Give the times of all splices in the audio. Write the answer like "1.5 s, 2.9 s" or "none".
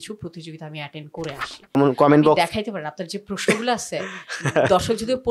1.8 s